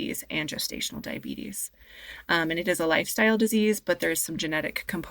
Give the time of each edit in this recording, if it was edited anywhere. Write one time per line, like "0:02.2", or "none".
none